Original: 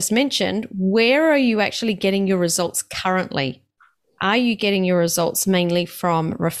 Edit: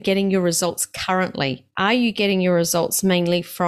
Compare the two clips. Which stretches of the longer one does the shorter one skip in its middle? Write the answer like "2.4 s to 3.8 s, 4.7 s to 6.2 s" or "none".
3.6 s to 4.1 s